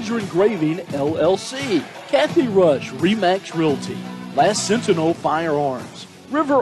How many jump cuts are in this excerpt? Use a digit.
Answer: 1